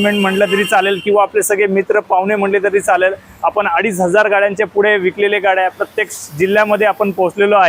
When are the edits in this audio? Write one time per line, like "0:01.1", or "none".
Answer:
none